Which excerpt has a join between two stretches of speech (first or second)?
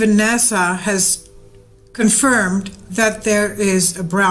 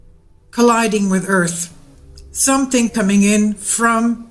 second